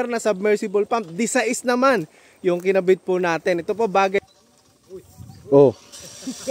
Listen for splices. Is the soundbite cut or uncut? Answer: cut